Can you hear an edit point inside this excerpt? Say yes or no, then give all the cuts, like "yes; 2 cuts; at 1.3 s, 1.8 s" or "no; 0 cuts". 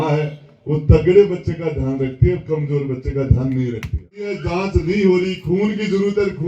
yes; 1 cut; at 4.4 s